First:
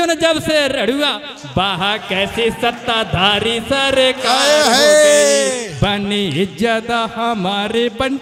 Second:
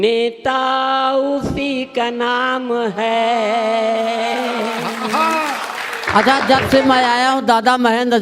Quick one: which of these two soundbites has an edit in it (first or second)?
second